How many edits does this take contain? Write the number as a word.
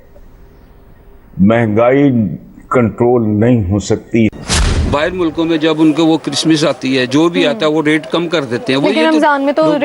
one